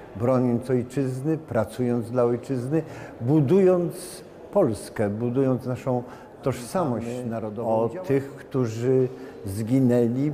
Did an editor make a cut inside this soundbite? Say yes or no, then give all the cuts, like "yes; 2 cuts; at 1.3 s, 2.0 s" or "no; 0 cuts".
yes; 1 cut; at 7.5 s